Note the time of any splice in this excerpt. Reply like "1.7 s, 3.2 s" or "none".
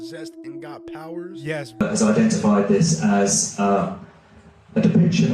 1.8 s